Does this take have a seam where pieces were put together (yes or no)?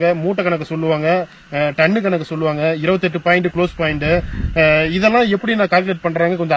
no